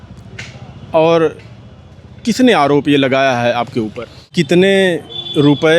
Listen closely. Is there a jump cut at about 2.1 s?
no; 1 cut; at 4.3 s

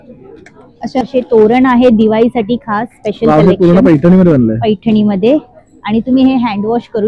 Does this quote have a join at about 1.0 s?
yes; 1 cut; at 1.0 s

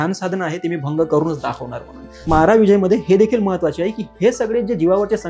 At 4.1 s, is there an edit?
no; 1 cut; at 2.2 s

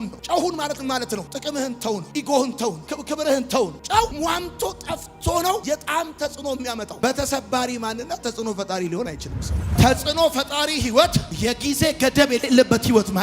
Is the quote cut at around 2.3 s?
no; 1 cut; at 9.8 s

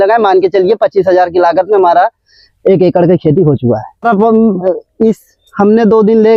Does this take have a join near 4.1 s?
yes; 1 cut; at 4.1 s

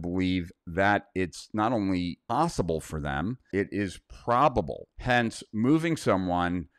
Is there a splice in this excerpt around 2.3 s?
yes; 3 cuts; at 2.3 s, 3.4 s, 4.8 s

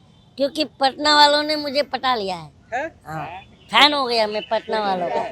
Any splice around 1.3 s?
no; 1 cut; at 3.5 s

